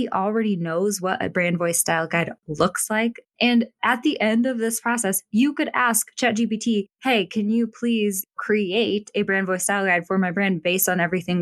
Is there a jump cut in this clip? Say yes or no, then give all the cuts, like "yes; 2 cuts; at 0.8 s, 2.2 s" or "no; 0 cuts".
no; 0 cuts